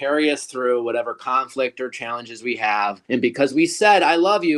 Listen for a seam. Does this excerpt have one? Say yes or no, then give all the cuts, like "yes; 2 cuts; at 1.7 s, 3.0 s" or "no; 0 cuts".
yes; 1 cut; at 3.0 s